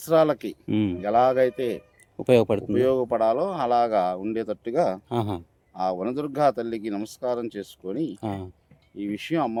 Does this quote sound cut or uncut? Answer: uncut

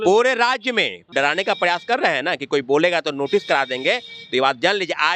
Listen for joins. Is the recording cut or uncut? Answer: cut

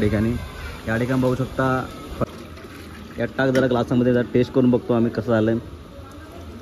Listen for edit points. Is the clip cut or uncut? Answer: cut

